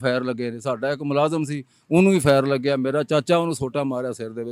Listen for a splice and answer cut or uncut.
uncut